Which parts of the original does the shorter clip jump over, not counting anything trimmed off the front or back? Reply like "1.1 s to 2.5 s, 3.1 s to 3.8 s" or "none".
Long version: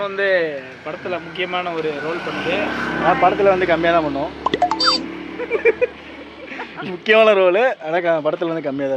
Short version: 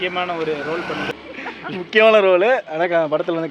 2.4 s to 6.2 s

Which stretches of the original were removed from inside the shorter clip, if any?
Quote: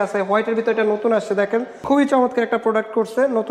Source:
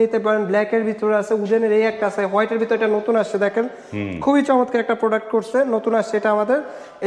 3.8 s to 4.1 s

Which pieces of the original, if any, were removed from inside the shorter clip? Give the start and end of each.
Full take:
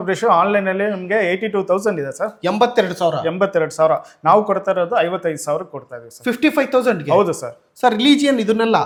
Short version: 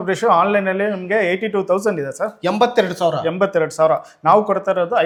none

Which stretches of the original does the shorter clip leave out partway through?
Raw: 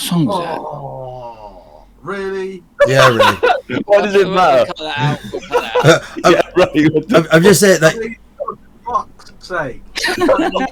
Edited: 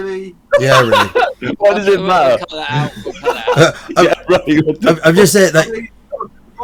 none

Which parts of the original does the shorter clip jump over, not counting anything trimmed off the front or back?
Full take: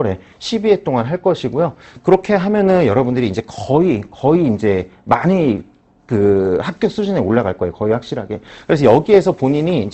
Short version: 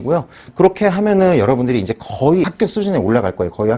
4.0 s to 6.7 s

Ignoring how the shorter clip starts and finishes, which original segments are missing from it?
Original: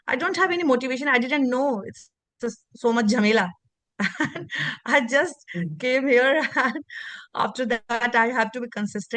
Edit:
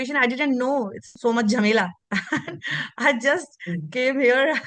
2.0 s to 2.6 s, 3.6 s to 3.9 s

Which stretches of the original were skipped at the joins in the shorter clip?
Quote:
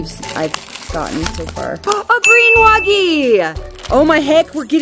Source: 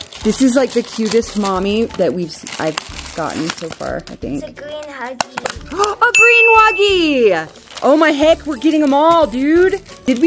4.1 s to 5.8 s

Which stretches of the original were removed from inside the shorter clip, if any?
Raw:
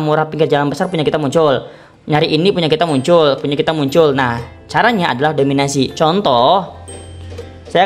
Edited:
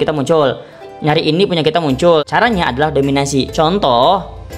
3.3 s to 4.6 s

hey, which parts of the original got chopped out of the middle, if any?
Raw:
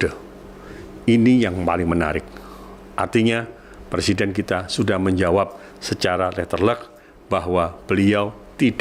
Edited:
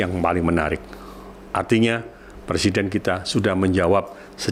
none

